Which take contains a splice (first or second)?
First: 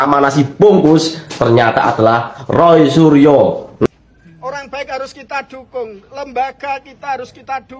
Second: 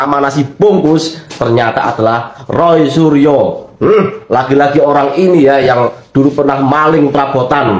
first